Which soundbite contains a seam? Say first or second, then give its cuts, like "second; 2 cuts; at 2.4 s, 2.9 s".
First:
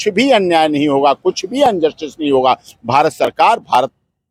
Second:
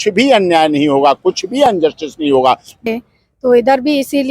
second; 1 cut; at 2.8 s